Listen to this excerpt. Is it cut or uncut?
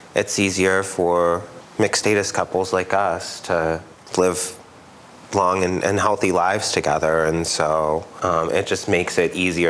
cut